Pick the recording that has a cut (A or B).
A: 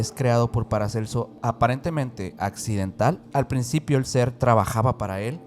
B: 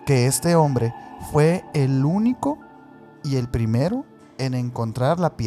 A